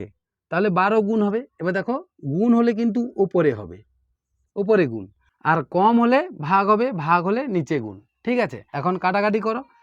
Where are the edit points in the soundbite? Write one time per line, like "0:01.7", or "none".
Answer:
0:08.6